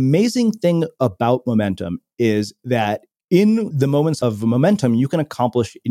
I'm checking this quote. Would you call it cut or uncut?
cut